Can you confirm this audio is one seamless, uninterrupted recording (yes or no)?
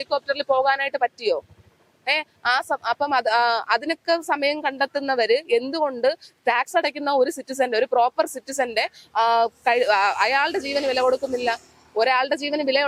yes